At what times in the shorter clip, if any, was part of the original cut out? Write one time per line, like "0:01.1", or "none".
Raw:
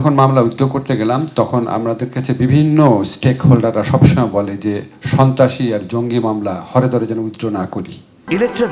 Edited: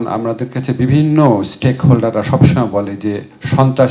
none